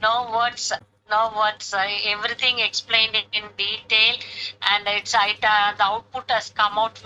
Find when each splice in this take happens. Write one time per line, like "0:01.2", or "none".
0:00.9